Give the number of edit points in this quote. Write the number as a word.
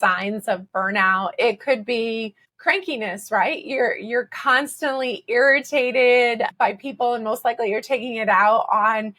two